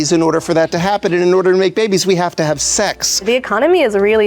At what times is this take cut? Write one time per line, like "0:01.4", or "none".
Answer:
0:03.2